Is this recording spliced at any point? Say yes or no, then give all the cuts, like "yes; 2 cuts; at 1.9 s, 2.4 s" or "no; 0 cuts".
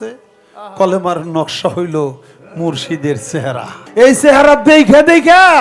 yes; 1 cut; at 3.8 s